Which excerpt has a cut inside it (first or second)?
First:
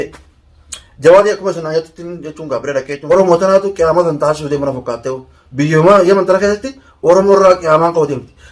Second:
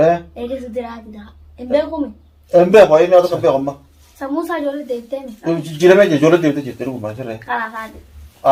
first